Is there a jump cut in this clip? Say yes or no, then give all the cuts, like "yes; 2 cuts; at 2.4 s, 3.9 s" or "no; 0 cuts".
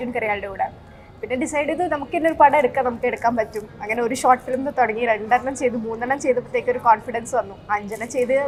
no; 0 cuts